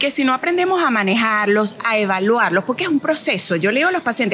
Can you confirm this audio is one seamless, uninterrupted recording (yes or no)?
yes